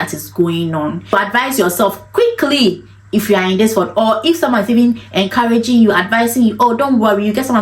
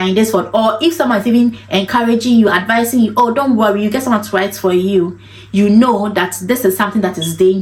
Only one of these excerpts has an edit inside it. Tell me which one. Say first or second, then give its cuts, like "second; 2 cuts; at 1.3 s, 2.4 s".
first; 1 cut; at 1.1 s